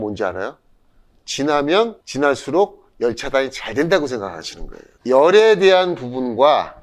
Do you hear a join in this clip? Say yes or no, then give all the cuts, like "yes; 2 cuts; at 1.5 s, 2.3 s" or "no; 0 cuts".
yes; 1 cut; at 2.0 s